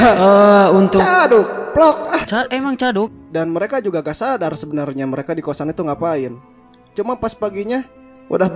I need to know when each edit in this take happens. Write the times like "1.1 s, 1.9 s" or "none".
3.1 s